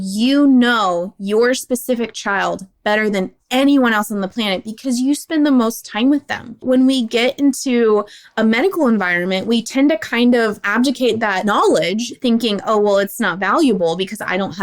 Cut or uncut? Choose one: cut